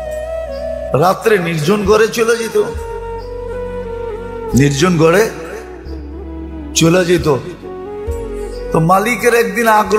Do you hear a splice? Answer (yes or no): yes